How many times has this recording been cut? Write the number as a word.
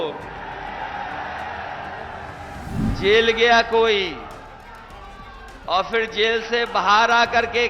one